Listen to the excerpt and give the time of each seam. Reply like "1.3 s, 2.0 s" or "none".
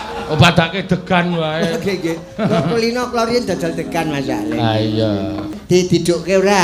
5.6 s